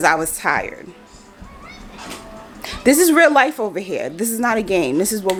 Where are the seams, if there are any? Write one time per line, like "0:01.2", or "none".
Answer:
none